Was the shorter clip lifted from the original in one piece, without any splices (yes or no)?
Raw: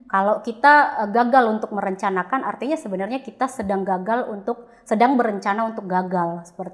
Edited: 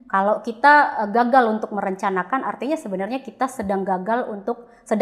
yes